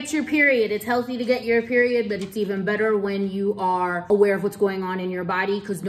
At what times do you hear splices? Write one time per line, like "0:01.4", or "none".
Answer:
0:04.0